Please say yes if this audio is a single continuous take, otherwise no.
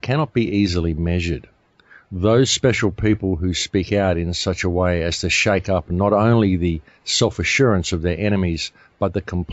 yes